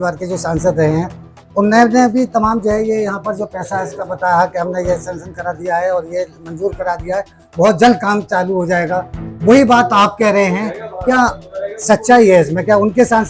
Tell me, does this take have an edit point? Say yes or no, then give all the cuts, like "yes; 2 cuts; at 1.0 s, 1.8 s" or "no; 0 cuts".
no; 0 cuts